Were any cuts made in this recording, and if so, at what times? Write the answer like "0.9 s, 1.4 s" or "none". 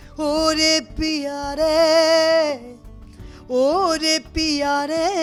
none